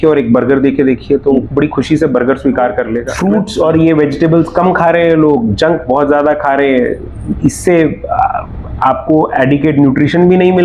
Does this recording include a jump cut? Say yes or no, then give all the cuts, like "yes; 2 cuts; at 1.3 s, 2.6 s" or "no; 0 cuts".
yes; 1 cut; at 3.1 s